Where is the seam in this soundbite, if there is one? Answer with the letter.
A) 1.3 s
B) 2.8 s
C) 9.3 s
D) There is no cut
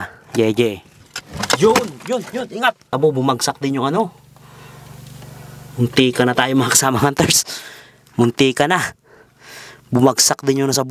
B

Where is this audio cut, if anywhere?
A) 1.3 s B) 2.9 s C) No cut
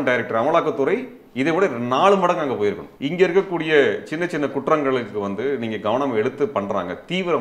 B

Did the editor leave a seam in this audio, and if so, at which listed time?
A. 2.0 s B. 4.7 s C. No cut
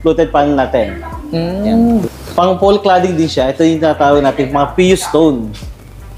A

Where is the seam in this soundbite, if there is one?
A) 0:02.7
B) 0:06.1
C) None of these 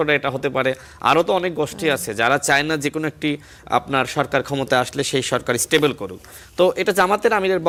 C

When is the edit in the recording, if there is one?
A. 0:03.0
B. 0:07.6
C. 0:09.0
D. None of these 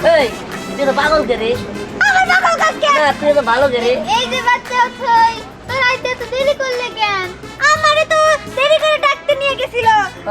A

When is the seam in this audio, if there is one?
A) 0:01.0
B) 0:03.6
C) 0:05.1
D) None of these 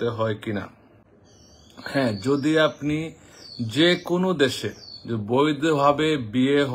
D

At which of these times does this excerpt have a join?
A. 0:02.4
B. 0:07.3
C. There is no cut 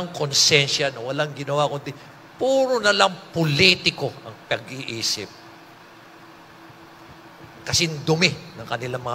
B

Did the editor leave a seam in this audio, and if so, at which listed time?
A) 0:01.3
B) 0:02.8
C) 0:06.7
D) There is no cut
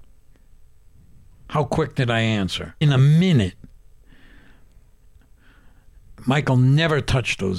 B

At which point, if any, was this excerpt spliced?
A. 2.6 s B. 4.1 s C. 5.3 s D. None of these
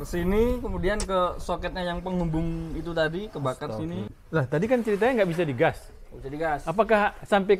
B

